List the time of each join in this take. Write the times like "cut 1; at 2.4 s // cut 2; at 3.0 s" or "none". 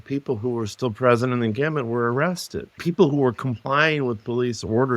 cut 1; at 2.8 s